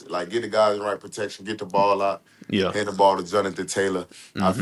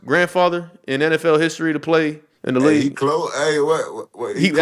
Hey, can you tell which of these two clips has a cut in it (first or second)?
second